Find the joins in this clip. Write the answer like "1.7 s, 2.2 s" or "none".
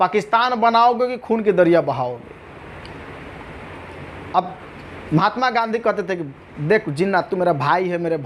none